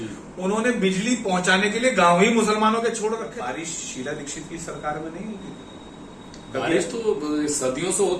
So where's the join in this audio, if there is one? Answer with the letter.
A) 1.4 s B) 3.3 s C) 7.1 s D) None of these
B